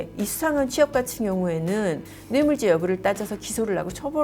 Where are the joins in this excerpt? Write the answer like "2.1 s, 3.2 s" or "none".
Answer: none